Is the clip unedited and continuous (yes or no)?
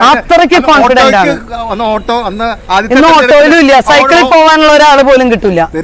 yes